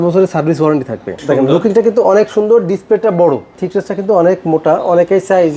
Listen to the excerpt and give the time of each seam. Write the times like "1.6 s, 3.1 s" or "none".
1.1 s, 3.6 s

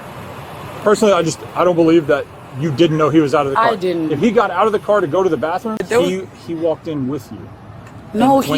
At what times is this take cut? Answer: 5.8 s

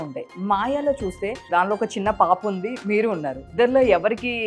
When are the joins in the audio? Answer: 1.4 s, 3.5 s

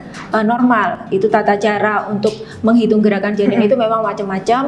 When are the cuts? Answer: none

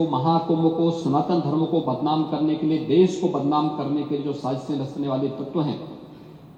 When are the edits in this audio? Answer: none

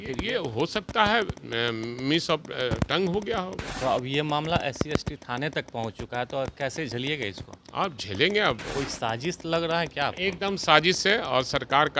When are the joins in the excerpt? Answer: 3.7 s, 8.8 s

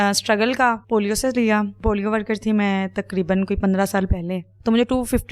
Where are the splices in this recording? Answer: 0.8 s, 1.7 s, 4.5 s

